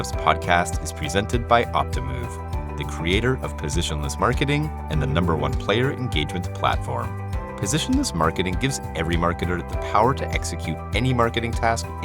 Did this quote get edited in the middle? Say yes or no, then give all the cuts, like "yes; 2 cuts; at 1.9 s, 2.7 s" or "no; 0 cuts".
no; 0 cuts